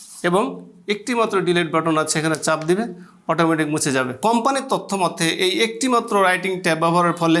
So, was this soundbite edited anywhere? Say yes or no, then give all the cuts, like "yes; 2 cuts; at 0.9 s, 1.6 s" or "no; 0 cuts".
yes; 1 cut; at 4.1 s